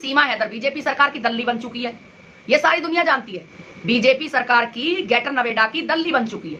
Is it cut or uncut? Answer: uncut